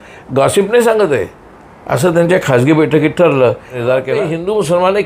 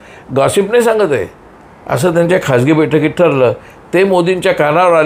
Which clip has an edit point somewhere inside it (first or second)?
first